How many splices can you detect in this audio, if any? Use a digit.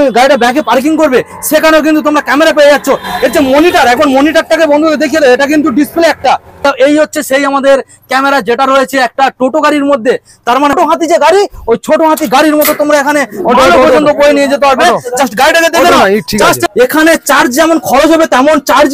3